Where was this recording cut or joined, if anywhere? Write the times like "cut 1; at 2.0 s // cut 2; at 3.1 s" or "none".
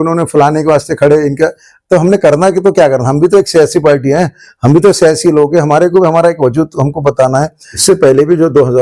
cut 1; at 7.8 s